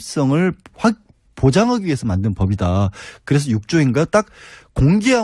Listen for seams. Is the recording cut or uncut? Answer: cut